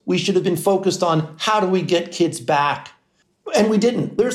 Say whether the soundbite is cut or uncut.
uncut